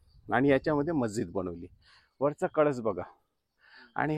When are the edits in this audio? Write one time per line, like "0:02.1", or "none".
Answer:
none